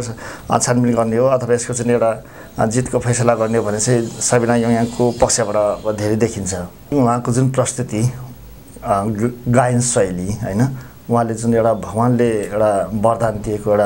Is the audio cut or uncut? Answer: cut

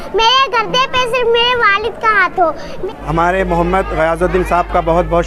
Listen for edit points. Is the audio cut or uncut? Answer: cut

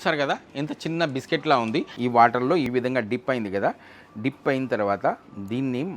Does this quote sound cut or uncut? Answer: cut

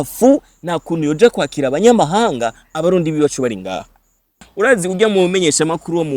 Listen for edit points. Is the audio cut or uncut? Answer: cut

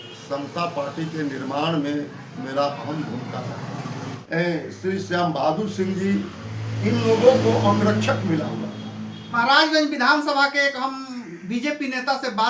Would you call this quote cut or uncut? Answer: cut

